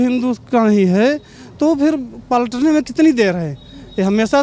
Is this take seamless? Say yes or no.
yes